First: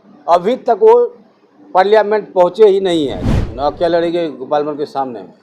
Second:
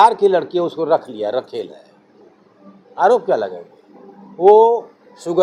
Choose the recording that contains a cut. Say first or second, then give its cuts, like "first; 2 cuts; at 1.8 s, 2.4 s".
first; 1 cut; at 3.2 s